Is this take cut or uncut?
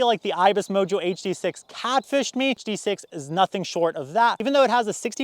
cut